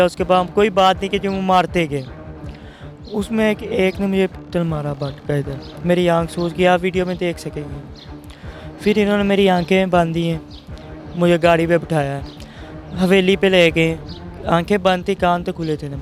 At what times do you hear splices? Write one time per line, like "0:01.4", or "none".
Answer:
none